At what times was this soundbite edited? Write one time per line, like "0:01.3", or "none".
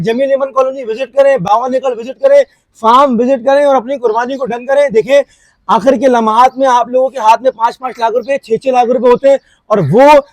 none